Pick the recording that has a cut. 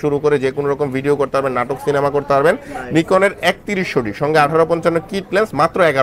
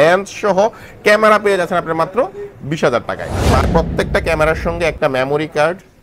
second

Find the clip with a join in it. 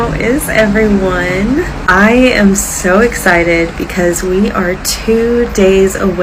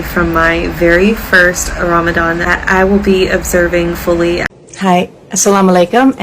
second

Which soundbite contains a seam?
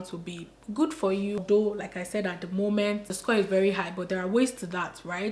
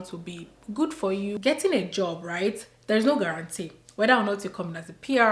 second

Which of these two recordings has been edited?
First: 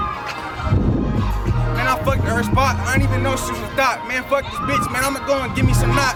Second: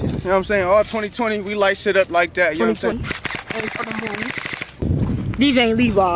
second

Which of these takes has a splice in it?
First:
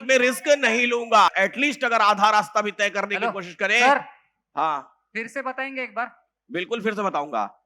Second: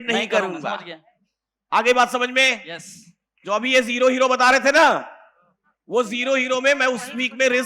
first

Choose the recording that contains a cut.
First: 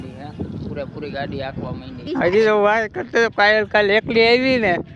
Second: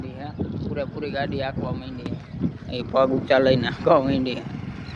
first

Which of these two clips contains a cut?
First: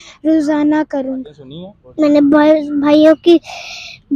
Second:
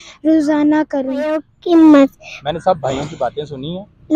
first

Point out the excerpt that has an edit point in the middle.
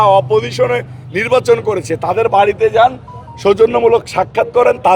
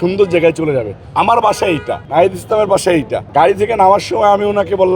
second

